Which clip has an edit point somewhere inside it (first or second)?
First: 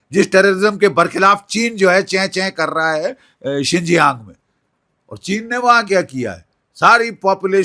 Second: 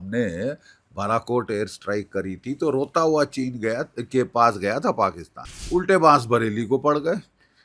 second